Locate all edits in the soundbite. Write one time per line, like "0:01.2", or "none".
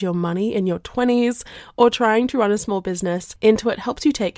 0:03.3